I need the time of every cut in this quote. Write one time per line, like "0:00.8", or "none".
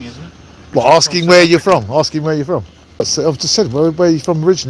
0:00.7
0:03.0